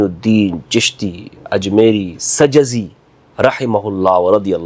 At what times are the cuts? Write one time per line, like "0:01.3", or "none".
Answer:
none